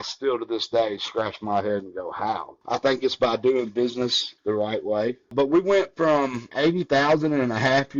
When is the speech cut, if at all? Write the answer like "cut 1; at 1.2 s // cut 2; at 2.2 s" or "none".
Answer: cut 1; at 2.5 s // cut 2; at 4.3 s // cut 3; at 5.3 s // cut 4; at 6.5 s